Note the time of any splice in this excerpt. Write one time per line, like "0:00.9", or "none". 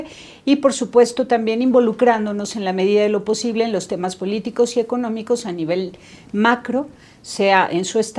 none